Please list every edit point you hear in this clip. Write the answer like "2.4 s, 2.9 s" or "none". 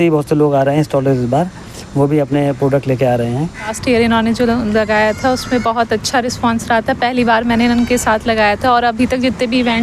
3.8 s